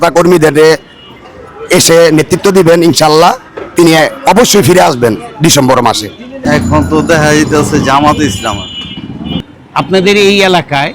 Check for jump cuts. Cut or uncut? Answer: cut